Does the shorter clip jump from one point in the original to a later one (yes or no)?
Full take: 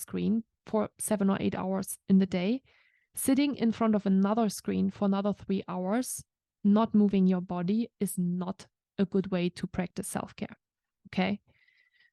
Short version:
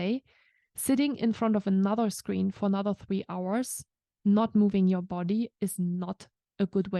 no